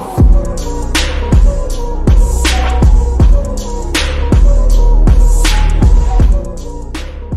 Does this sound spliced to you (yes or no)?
no